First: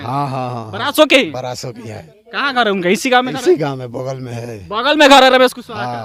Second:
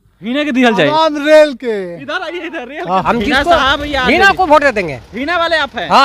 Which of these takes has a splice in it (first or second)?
second